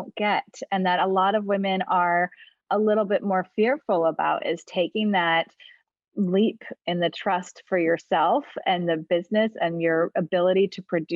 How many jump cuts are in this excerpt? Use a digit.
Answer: 0